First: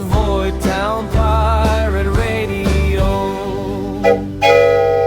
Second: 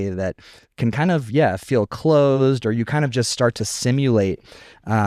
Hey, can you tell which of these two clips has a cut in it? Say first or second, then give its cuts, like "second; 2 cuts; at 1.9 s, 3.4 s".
first; 1 cut; at 3.9 s